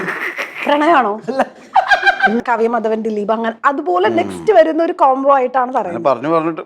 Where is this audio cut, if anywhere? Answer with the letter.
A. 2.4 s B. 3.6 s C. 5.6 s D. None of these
A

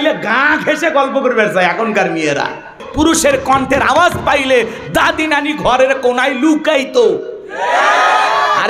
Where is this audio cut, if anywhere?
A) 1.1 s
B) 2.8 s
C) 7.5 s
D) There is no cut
B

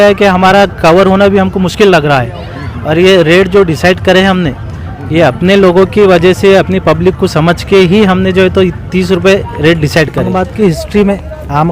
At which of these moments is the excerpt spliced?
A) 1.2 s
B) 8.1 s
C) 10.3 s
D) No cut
C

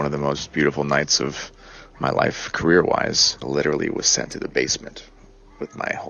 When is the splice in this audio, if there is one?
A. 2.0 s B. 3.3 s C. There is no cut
B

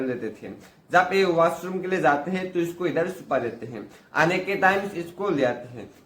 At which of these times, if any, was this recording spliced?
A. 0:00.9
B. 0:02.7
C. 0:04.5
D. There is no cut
D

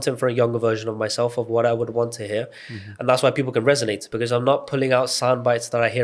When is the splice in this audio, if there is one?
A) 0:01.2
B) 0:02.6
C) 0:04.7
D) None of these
D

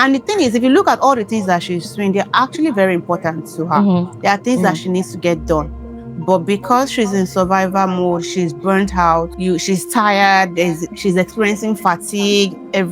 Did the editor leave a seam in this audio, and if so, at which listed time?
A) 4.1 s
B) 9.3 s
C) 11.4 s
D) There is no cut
B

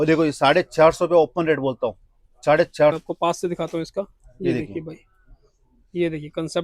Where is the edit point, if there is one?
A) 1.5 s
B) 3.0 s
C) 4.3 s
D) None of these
B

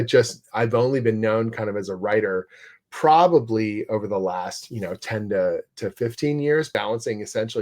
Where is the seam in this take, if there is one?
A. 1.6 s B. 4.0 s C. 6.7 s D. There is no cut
C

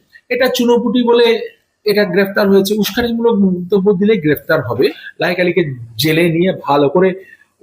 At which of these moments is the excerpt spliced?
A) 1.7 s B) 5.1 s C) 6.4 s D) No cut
B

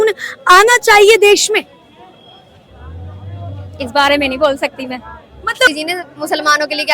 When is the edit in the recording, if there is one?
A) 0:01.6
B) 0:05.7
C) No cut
B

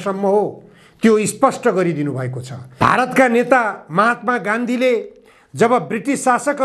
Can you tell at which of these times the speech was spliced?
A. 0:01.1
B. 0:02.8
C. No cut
B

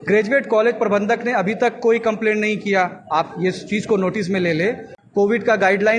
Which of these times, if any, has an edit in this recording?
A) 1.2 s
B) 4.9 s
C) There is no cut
B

